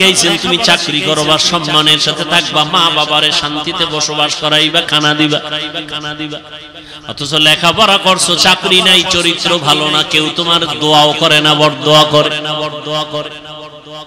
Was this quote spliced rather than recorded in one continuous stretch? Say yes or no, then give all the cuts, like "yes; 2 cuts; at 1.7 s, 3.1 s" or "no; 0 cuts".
no; 0 cuts